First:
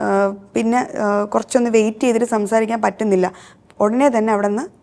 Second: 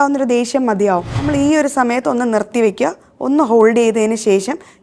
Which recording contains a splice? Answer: second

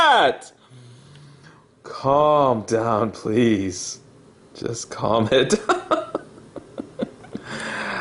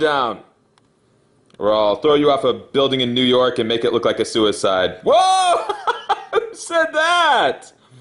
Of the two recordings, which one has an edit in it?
second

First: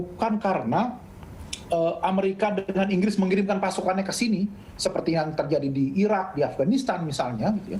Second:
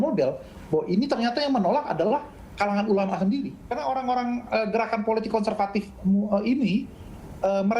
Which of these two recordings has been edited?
second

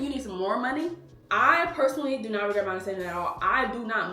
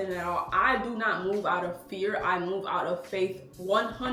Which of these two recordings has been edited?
first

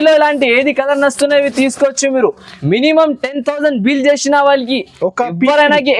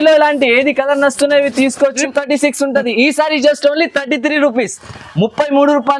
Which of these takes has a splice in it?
second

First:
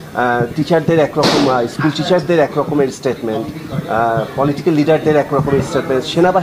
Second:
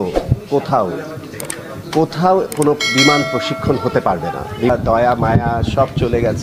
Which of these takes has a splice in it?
second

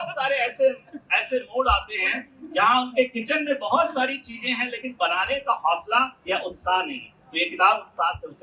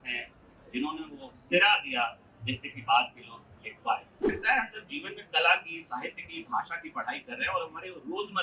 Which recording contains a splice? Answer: second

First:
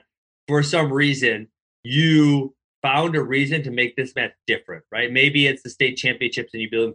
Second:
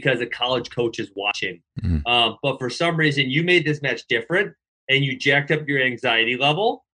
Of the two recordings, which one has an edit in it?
first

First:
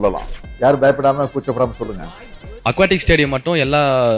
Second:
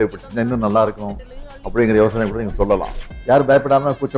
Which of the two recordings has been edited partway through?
first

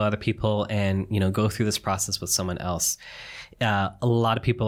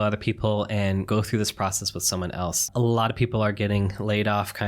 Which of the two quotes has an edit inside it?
second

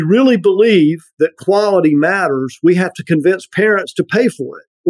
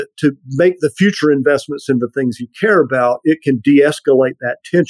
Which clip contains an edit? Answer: first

